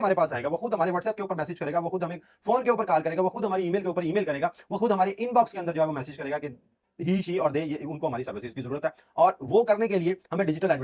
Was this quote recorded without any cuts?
yes; 0 cuts

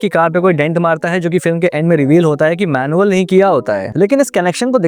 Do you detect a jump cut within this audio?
no; 0 cuts

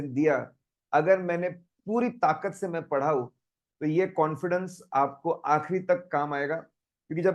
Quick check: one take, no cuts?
yes; 0 cuts

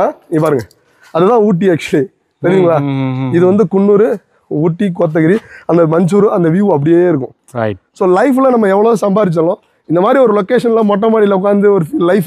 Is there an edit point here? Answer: no; 0 cuts

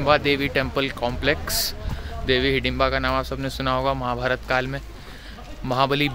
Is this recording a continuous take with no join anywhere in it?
yes; 0 cuts

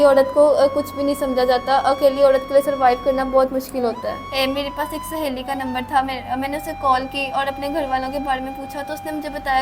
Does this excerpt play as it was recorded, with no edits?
no; 1 cut; at 4.2 s

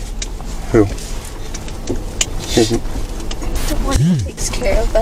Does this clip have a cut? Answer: no; 0 cuts

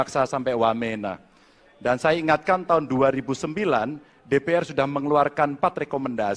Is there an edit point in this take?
no; 0 cuts

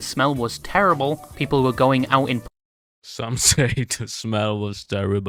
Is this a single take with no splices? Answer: yes; 0 cuts

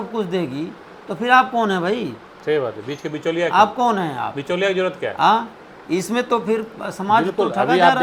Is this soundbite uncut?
yes; 0 cuts

